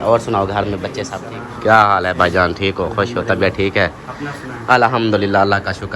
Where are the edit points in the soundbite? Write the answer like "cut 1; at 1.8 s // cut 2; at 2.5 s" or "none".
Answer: cut 1; at 1.1 s